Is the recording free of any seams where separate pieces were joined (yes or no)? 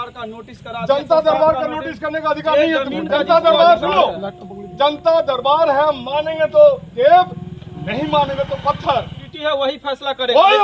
no